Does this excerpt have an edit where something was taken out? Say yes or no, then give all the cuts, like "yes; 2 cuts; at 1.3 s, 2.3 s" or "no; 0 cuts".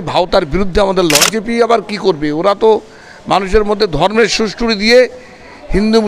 yes; 1 cut; at 1.2 s